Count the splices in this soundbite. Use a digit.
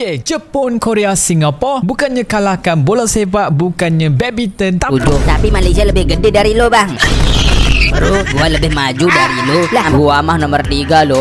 2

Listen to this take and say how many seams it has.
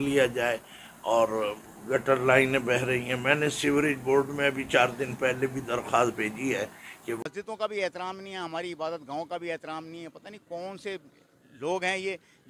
1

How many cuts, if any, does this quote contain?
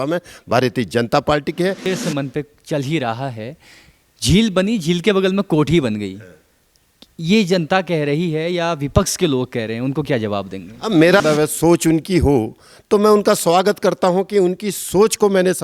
2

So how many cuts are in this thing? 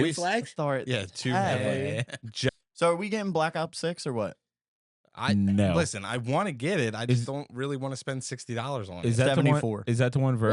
1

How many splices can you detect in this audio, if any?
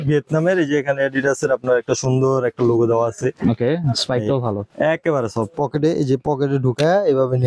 0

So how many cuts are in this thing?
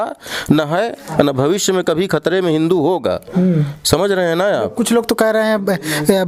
0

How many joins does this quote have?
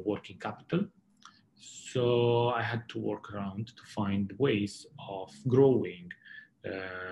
0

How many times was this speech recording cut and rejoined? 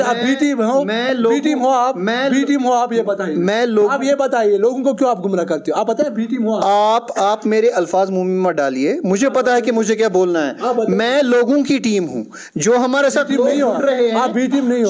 0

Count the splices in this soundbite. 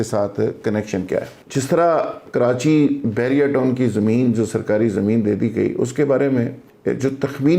1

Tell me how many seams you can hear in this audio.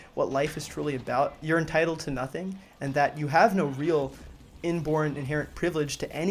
1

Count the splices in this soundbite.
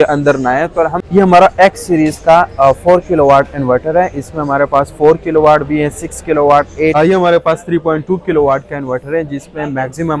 2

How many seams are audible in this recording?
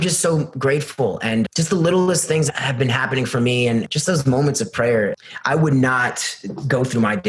4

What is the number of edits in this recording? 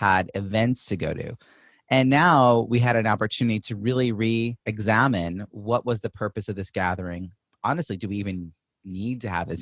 1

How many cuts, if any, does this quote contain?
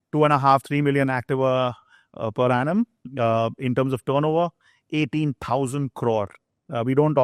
0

